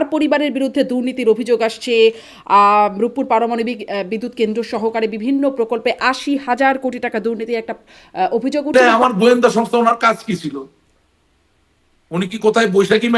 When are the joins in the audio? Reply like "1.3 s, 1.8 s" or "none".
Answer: 8.7 s